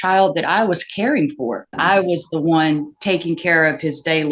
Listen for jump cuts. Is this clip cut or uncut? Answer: cut